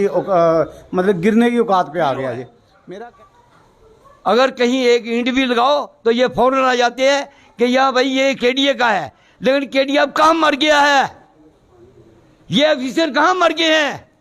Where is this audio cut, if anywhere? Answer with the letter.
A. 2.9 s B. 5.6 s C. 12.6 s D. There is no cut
A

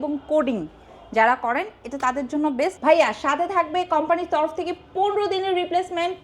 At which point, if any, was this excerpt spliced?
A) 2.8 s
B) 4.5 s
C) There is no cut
A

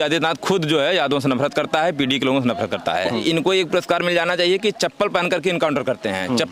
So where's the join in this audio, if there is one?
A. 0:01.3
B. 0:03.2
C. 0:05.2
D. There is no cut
B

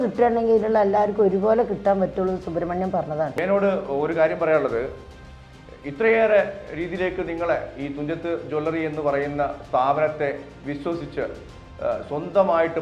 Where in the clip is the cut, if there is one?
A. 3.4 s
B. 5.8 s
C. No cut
A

